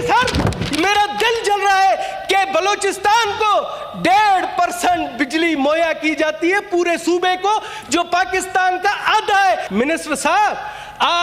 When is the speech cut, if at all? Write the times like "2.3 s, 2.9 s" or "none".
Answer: 9.7 s